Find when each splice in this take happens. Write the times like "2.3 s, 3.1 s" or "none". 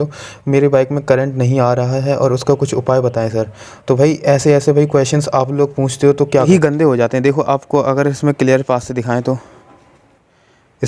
6.5 s